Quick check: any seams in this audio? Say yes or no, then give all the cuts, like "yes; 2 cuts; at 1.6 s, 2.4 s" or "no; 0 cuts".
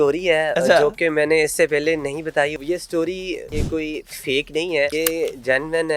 yes; 3 cuts; at 2.5 s, 3.6 s, 4.9 s